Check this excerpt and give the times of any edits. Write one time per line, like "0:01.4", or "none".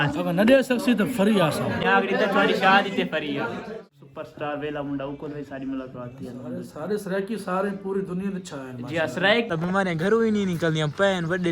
0:01.8
0:03.6
0:09.5